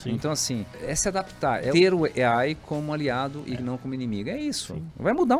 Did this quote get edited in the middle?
no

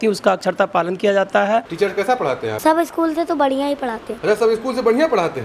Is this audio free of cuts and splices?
no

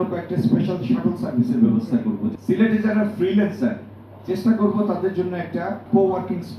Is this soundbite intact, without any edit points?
no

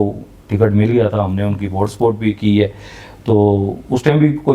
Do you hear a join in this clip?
no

